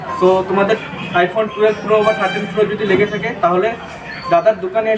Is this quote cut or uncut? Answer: uncut